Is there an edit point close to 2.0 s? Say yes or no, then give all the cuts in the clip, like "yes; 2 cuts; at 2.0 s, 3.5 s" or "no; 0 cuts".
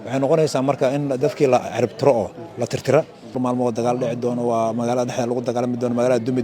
no; 1 cut; at 3.4 s